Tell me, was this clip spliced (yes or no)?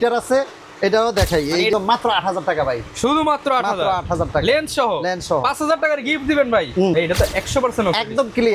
yes